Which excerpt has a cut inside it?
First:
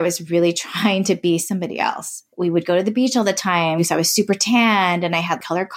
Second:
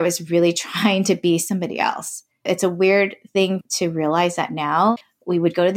first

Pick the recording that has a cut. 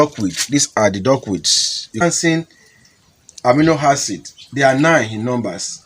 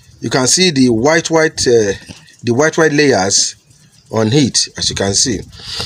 first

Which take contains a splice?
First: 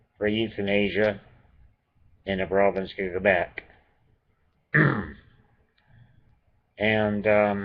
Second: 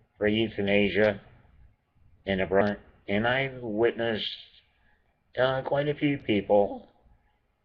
first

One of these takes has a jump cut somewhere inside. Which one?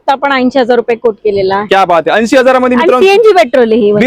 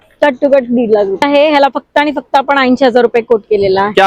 second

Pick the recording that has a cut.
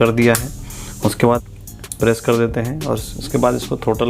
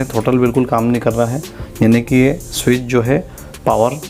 first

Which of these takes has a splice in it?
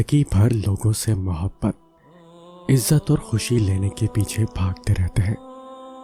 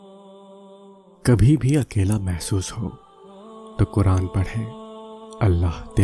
second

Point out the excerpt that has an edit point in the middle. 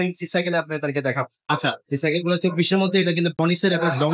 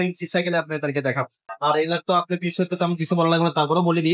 second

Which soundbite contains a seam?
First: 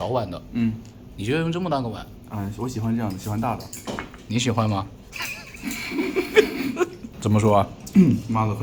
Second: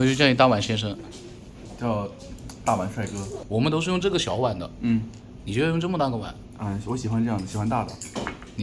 second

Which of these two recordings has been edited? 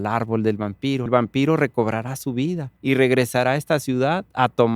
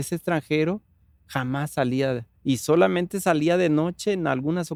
first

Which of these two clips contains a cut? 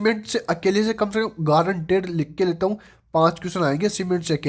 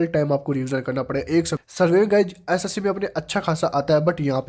second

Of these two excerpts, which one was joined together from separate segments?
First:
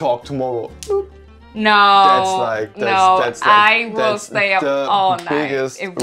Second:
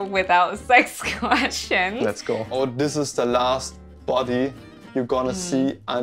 second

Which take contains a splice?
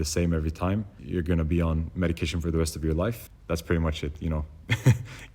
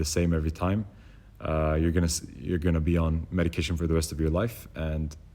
first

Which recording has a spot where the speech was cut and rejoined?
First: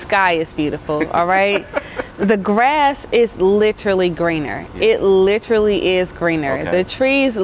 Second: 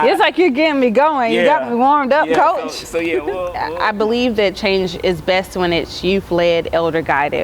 second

